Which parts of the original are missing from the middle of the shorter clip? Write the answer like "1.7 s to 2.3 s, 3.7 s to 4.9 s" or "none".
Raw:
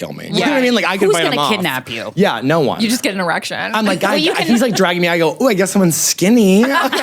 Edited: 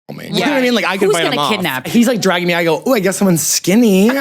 1.9 s to 4.4 s